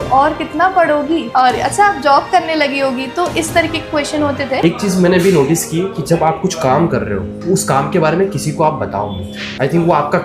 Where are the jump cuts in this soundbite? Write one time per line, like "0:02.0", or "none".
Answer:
0:04.6